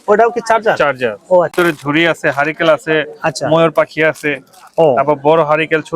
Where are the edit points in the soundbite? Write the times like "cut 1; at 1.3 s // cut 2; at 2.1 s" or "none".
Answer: cut 1; at 1.5 s